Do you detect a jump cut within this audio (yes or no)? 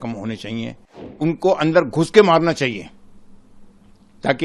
yes